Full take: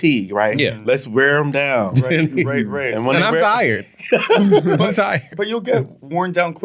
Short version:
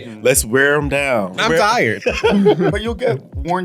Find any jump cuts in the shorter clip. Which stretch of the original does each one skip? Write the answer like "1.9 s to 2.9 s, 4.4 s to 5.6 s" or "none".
2.1 s to 3.6 s, 4.8 s to 5.4 s